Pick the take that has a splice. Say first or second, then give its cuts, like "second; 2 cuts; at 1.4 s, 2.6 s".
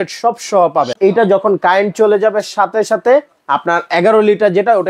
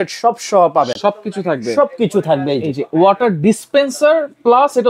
first; 1 cut; at 0.9 s